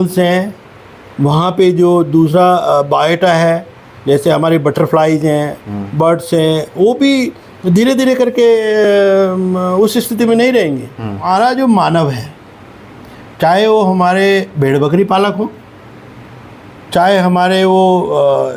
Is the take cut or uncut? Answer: cut